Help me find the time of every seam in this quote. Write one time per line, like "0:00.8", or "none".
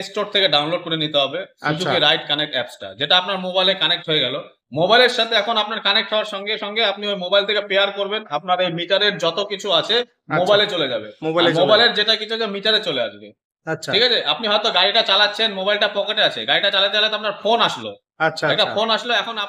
none